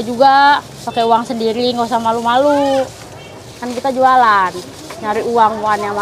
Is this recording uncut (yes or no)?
yes